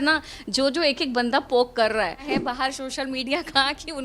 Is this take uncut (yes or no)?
no